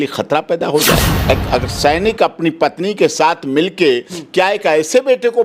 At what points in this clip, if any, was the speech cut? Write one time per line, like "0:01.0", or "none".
0:01.1

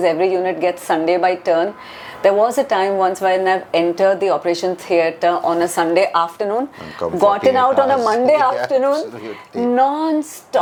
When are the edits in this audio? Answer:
none

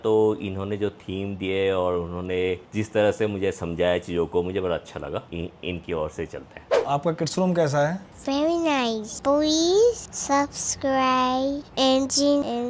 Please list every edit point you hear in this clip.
0:05.3
0:06.7
0:09.1
0:10.1

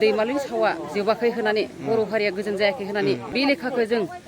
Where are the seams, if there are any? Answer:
0:03.3

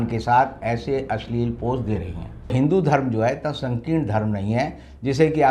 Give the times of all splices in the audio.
0:02.5

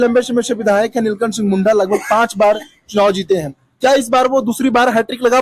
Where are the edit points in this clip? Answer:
none

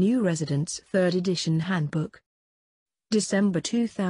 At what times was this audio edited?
0:02.9

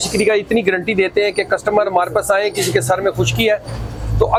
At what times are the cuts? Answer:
none

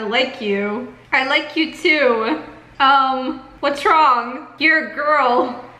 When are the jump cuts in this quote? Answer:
0:00.9
0:02.6
0:03.5

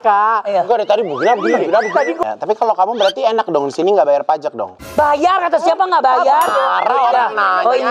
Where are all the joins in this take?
0:02.2

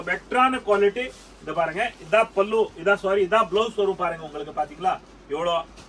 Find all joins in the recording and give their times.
none

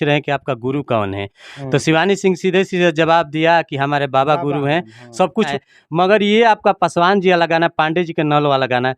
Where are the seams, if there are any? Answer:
0:05.5

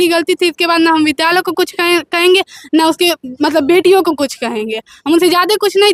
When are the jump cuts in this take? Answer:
none

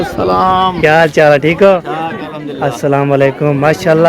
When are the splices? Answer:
0:01.8

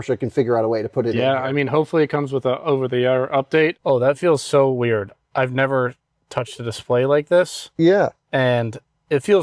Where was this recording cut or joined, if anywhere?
0:03.8

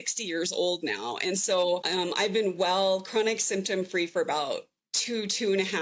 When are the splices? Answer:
0:01.9

